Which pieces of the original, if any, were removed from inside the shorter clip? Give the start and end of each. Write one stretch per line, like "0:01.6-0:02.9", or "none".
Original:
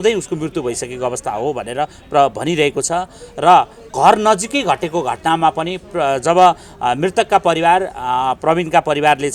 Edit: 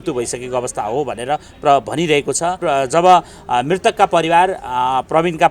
0:03.1-0:05.9